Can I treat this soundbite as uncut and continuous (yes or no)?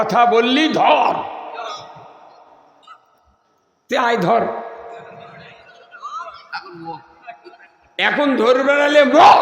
yes